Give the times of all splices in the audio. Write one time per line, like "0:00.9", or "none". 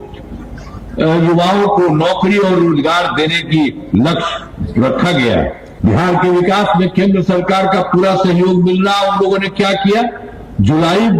0:05.6